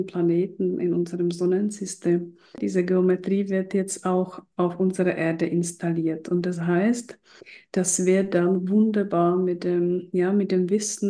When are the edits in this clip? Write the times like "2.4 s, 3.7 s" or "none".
2.6 s